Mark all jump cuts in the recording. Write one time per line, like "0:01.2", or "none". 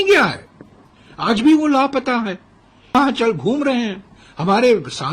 0:02.9